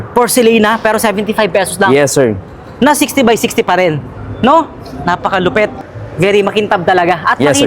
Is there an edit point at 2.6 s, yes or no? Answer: no